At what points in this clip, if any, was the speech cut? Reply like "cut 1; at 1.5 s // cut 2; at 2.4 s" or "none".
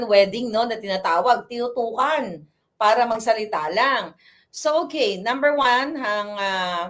none